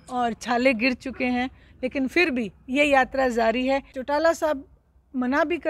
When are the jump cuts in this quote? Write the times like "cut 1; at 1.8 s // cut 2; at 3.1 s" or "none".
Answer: cut 1; at 3.9 s